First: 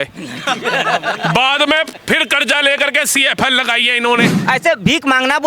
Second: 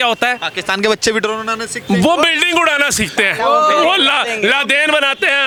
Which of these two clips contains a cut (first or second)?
first